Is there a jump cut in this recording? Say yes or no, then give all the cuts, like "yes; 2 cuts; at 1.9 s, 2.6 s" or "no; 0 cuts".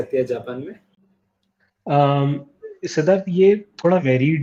no; 0 cuts